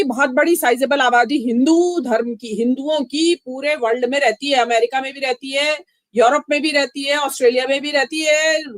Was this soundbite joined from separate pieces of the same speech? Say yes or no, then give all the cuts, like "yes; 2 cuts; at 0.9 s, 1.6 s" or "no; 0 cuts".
no; 0 cuts